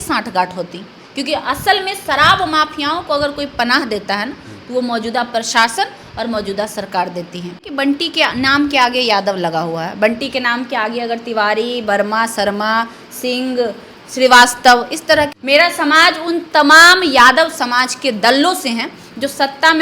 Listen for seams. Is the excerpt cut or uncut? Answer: cut